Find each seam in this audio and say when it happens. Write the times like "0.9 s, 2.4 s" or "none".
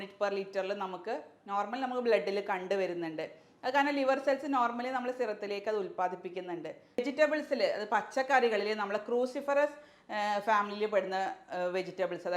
7.0 s